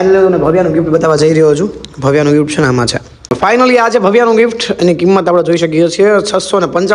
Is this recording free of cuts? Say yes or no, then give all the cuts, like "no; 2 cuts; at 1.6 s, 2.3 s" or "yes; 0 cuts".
no; 1 cut; at 3.3 s